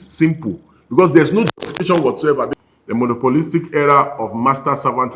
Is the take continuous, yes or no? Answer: no